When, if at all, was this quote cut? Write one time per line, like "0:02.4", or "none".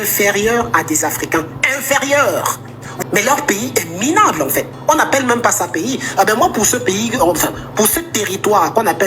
0:02.9